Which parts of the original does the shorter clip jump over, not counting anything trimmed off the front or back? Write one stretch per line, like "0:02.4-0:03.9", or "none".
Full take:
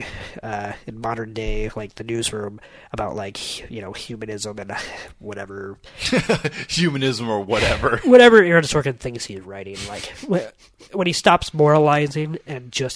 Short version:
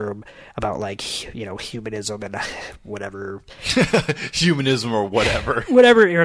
none